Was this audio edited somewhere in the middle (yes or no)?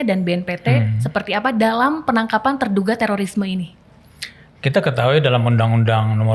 no